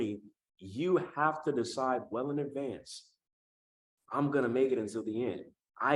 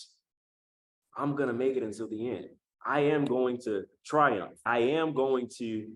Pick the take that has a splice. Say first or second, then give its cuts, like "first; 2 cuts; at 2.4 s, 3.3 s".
second; 2 cuts; at 3.9 s, 4.6 s